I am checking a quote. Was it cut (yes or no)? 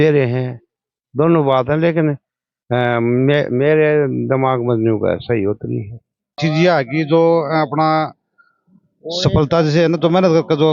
yes